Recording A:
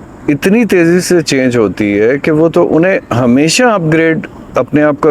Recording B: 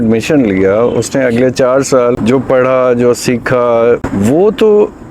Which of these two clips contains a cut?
B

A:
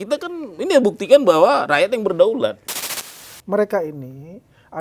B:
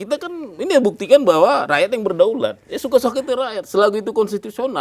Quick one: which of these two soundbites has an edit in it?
A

